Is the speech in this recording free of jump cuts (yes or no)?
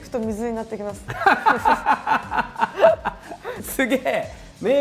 no